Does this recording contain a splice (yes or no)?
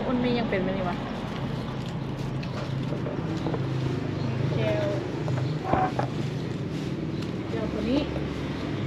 no